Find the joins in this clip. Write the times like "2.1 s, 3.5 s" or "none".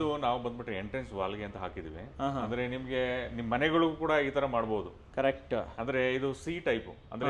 none